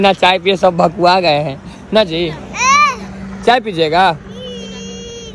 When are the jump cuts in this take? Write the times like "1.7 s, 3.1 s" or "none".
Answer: none